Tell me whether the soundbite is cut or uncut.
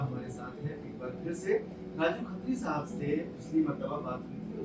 uncut